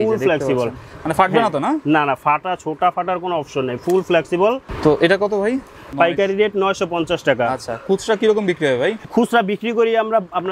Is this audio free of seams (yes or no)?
no